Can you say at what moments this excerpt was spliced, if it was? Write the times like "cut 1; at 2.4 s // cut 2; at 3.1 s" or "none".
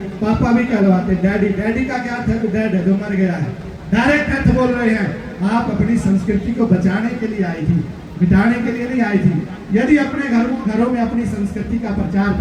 none